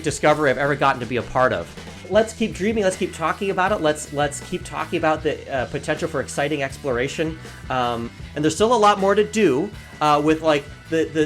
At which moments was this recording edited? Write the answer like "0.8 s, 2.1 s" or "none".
1.9 s, 8.1 s